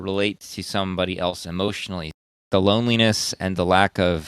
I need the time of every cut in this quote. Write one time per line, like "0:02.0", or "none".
0:02.4